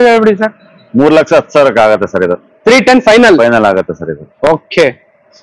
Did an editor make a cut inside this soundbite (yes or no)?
no